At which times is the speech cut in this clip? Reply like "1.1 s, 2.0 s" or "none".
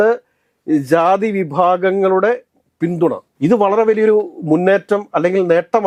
none